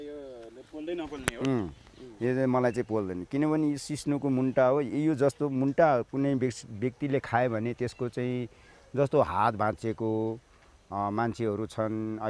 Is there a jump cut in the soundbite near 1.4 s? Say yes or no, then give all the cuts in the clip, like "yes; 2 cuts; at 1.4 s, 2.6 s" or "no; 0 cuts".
no; 0 cuts